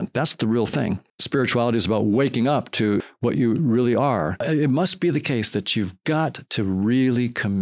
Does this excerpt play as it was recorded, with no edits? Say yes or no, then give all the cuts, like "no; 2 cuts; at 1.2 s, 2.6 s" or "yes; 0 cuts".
no; 3 cuts; at 1.1 s, 3.1 s, 4.4 s